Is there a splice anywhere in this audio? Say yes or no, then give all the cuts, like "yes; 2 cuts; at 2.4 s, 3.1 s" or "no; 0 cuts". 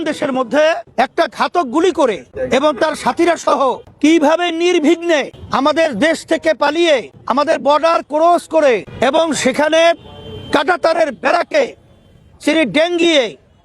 yes; 6 cuts; at 0.8 s, 2.3 s, 3.9 s, 5.4 s, 7.2 s, 8.9 s